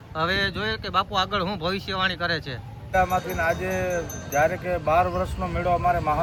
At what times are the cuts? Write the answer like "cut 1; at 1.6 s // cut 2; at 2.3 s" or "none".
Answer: none